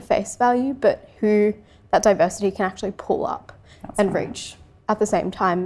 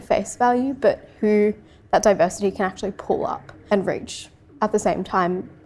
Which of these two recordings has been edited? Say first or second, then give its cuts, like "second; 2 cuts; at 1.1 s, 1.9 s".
second; 1 cut; at 3.5 s